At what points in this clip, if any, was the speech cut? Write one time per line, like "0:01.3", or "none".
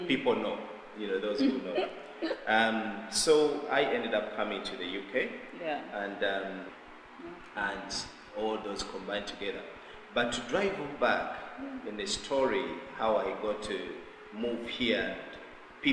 0:06.7